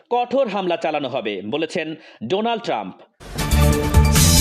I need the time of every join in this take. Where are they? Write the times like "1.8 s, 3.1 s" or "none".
3.3 s

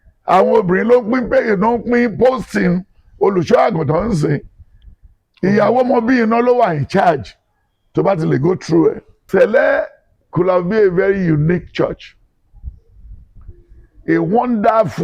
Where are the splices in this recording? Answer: 9.1 s

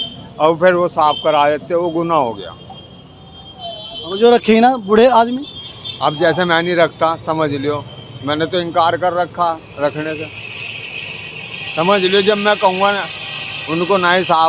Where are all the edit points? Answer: none

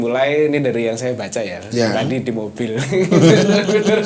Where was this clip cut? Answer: none

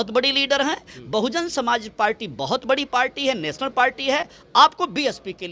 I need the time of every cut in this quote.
none

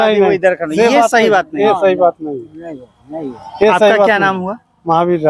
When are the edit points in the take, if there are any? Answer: none

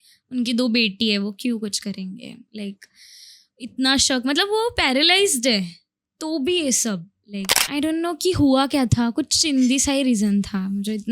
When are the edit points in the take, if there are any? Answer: 7.6 s

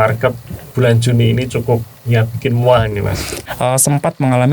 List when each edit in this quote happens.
3.3 s

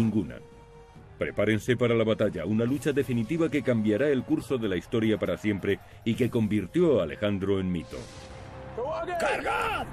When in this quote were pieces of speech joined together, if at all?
none

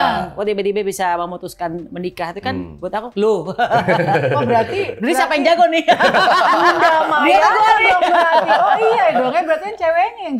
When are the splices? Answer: none

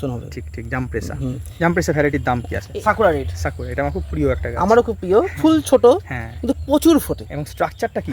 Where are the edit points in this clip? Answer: 2.6 s

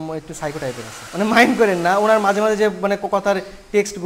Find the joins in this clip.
0.9 s

